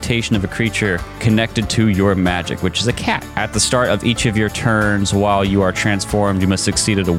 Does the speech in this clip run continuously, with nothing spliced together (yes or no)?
no